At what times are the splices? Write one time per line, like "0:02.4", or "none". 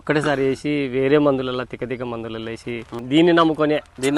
0:03.0